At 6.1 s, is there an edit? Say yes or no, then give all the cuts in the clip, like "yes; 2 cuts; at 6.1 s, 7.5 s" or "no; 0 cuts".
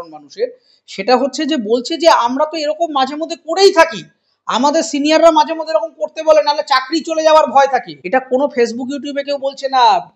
no; 1 cut; at 8.0 s